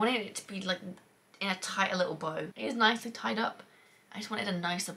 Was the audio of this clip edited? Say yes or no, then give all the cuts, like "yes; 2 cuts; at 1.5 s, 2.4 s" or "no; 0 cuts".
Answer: yes; 1 cut; at 2.5 s